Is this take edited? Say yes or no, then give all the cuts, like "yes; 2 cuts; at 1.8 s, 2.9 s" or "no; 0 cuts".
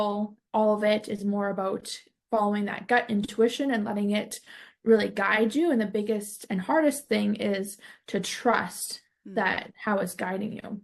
no; 0 cuts